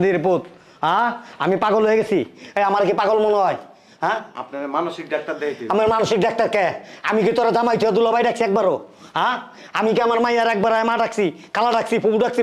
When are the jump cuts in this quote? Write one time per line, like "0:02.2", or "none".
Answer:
none